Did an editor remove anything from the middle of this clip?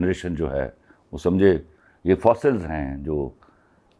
no; 0 cuts

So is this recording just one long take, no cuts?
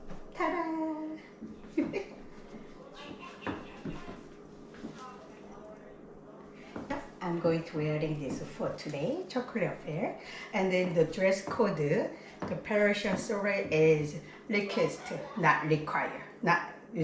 yes; 0 cuts

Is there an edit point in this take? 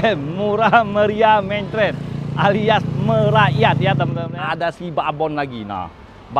yes; 1 cut; at 4.2 s

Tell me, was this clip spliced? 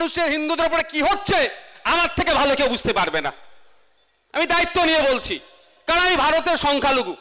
no; 0 cuts

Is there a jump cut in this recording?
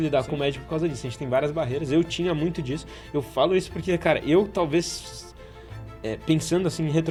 no; 0 cuts

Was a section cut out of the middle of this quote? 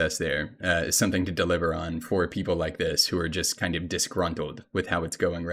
no; 0 cuts

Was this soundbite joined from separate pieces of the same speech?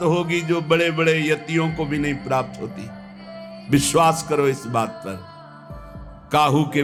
no; 0 cuts

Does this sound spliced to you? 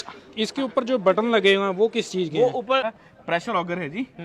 yes; 1 cut; at 2.8 s

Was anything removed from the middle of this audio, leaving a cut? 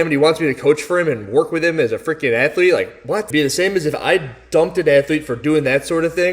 yes; 1 cut; at 3.2 s

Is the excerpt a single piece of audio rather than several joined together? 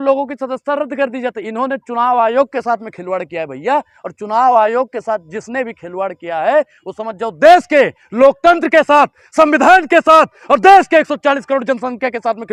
yes; 0 cuts

